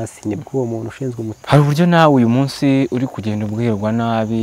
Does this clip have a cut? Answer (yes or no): yes